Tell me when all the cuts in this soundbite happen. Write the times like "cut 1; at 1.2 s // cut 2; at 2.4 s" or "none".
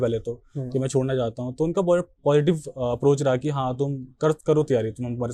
none